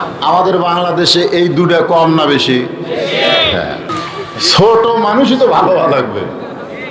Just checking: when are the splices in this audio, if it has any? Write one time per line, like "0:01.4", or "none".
0:03.9